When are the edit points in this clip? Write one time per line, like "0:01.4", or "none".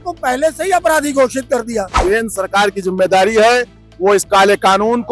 0:02.0

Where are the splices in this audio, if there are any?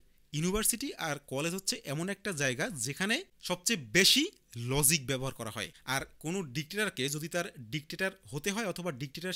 0:03.3
0:05.7

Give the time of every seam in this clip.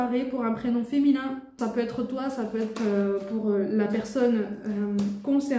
0:01.5

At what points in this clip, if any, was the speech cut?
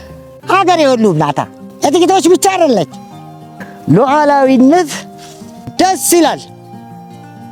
none

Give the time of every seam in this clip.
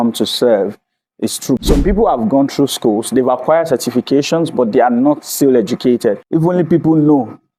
0:01.6
0:06.2

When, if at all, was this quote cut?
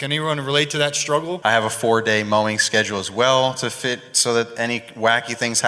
0:01.4

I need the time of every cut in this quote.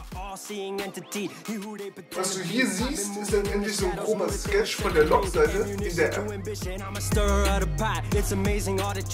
none

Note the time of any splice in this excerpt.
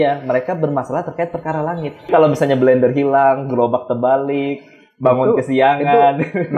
0:02.1

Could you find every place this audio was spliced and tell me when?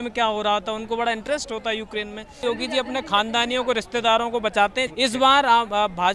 0:02.4
0:04.9

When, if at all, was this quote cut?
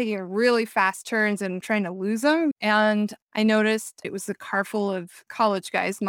0:01.6
0:02.6
0:04.0
0:05.3

